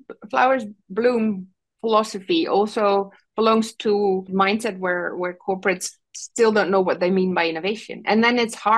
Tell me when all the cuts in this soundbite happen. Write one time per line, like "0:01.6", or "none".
0:04.3